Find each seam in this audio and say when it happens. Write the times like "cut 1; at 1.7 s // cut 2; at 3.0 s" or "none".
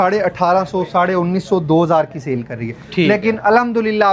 none